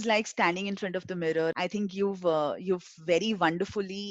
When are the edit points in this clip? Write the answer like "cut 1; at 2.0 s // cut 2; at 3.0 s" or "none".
cut 1; at 1.5 s